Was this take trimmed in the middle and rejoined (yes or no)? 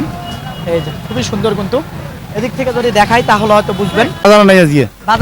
yes